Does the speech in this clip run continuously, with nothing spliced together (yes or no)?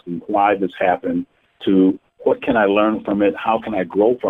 yes